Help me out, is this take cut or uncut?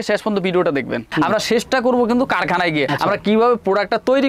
cut